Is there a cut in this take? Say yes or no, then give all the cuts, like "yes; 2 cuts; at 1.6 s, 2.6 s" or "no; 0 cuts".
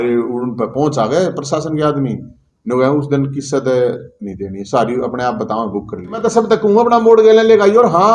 yes; 1 cut; at 6.2 s